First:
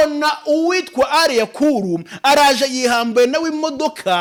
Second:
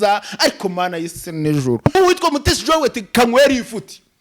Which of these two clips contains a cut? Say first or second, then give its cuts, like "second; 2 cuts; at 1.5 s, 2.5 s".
second; 1 cut; at 1.9 s